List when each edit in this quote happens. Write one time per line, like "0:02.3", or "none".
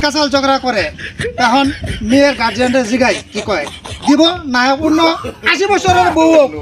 none